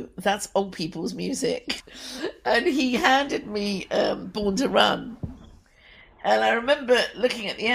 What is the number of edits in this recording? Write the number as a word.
one